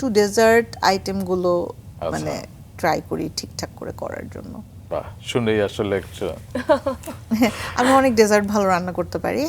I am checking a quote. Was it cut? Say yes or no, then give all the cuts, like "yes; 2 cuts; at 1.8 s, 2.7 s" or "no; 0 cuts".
no; 0 cuts